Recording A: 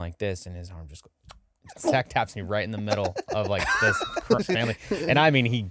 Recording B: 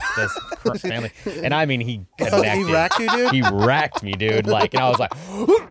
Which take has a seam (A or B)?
A